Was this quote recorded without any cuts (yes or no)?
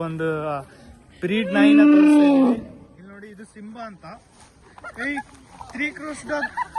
yes